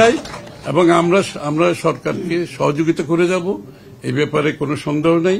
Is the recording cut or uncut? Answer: uncut